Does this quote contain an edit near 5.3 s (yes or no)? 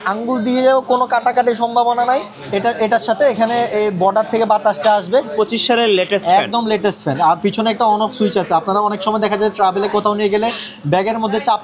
yes